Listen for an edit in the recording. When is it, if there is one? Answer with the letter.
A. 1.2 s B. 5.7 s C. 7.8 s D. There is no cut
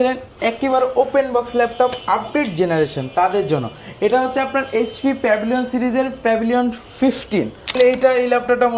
C